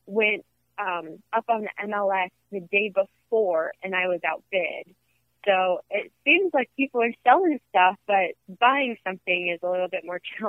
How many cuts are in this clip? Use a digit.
2